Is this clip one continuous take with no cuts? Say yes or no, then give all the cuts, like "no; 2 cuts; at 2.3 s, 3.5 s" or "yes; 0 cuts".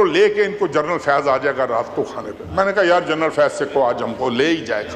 yes; 0 cuts